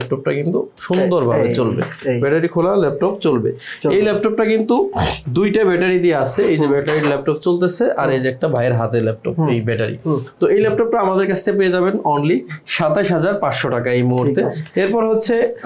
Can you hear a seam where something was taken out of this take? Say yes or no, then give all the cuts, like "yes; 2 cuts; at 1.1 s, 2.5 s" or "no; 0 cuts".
no; 0 cuts